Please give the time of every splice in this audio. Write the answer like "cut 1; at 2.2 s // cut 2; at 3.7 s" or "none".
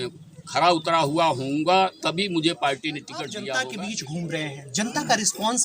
cut 1; at 3.5 s